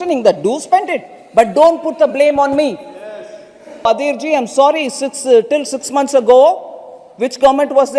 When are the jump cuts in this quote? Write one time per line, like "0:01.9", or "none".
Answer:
0:03.9